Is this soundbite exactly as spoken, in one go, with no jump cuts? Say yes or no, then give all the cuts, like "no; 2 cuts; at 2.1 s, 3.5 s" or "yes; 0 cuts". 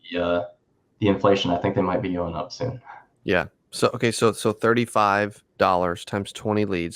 no; 1 cut; at 5.4 s